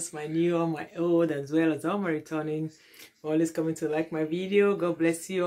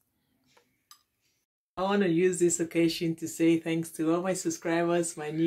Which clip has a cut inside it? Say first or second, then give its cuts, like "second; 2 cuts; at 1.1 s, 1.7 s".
second; 1 cut; at 1.6 s